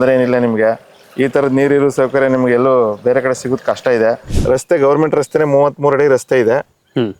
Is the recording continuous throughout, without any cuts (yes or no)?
no